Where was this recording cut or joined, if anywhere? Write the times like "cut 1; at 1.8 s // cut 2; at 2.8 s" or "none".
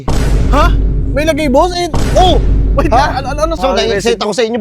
cut 1; at 3.6 s